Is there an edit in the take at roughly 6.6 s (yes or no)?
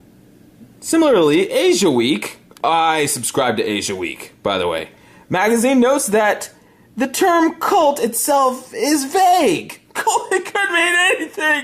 no